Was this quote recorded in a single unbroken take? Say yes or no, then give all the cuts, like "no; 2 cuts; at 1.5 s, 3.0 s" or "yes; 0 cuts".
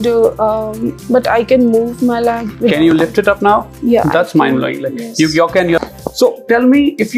no; 1 cut; at 5.8 s